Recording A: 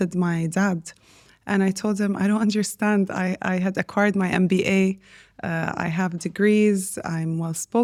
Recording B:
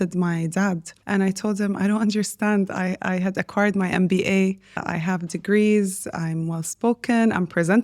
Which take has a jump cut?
B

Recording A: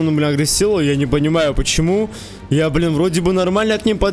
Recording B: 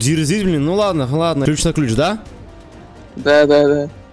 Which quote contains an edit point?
B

